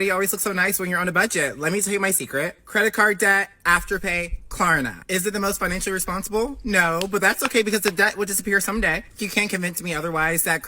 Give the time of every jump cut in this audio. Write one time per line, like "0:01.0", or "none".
none